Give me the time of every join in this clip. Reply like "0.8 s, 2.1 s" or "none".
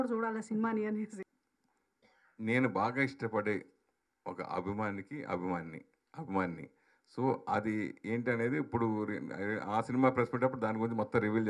1.4 s